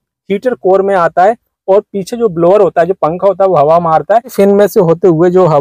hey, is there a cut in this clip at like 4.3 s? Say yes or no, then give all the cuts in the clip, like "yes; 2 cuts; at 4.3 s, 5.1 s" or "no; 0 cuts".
yes; 1 cut; at 4.3 s